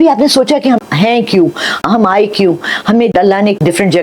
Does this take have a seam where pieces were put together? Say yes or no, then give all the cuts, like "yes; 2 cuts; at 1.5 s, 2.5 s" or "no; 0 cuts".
no; 0 cuts